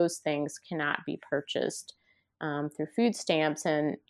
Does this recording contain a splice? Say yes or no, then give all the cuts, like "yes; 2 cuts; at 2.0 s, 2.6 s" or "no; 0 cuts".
no; 0 cuts